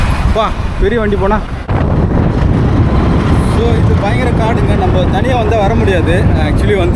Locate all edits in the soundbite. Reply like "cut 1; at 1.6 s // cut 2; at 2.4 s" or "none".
cut 1; at 1.7 s